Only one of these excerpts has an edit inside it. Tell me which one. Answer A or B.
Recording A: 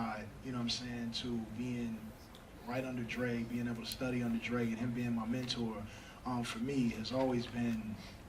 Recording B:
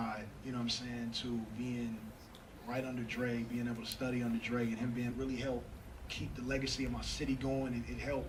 A